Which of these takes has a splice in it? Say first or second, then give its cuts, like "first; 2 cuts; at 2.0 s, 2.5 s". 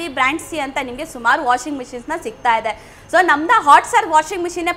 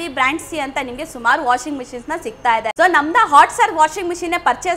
second; 1 cut; at 2.7 s